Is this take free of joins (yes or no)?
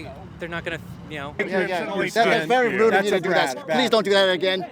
no